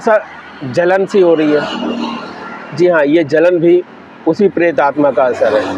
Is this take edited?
no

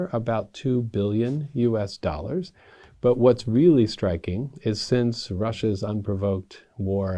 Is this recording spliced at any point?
no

